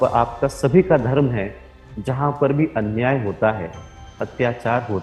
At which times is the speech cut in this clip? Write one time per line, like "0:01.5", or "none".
none